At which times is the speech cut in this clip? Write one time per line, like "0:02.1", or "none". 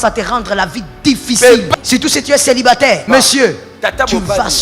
0:01.7
0:03.0